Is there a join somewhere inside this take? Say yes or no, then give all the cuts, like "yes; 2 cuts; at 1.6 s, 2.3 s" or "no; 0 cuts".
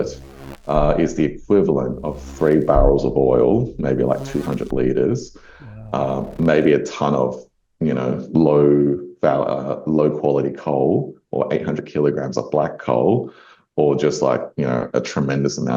no; 0 cuts